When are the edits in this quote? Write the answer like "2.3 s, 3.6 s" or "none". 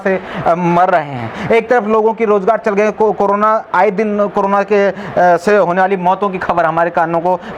none